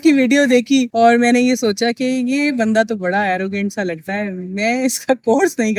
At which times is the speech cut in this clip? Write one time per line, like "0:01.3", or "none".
none